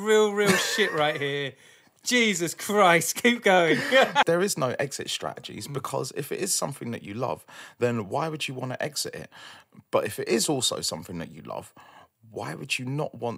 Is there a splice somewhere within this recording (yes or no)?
yes